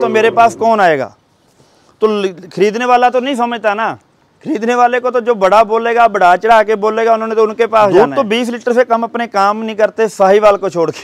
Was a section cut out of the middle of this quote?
yes; 1 cut; at 7.9 s

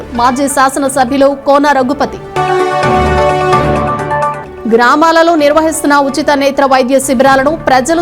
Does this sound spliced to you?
no; 0 cuts

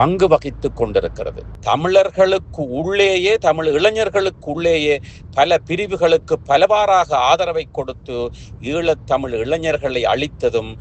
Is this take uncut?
no; 1 cut; at 1.5 s

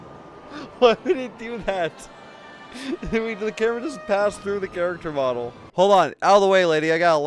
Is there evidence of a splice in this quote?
yes; 1 cut; at 5.6 s

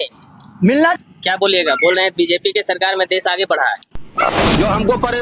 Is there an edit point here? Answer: yes; 2 cuts; at 1.0 s, 4.3 s

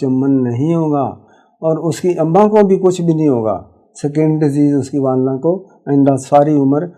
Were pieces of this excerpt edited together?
no; 0 cuts

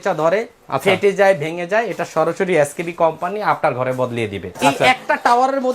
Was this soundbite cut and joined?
yes; 1 cut; at 4.4 s

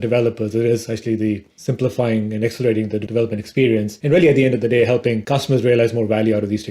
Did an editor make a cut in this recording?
yes; 3 cuts; at 3.0 s, 3.9 s, 5.2 s

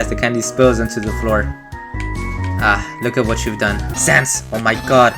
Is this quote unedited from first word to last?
no; 1 cut; at 3.9 s

